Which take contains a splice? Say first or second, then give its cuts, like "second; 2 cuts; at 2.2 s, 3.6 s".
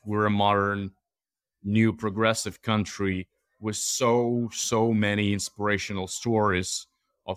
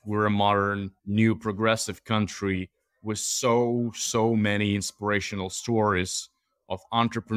second; 1 cut; at 0.9 s